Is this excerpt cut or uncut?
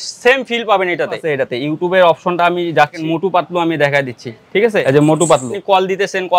cut